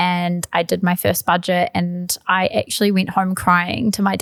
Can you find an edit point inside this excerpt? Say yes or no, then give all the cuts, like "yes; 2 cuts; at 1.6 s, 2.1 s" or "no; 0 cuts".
no; 0 cuts